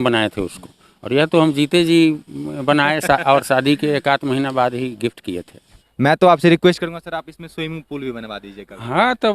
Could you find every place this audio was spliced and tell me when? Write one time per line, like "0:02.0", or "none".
0:05.8